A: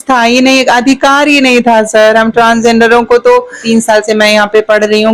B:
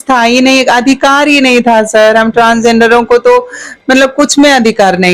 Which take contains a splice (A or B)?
A